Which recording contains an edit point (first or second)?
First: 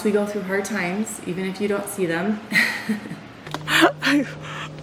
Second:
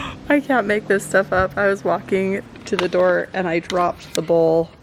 first